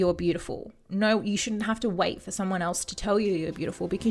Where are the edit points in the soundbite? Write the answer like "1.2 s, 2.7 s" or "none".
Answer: none